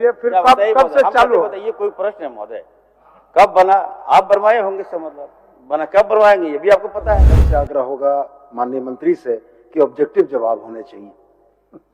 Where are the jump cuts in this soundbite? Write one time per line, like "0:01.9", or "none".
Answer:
0:07.4